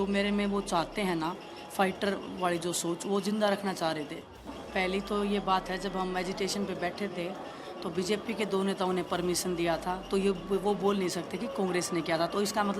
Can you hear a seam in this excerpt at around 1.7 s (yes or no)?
no